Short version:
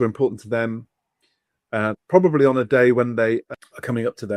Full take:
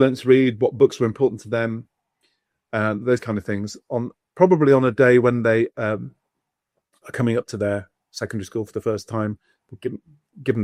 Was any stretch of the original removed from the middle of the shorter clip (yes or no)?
yes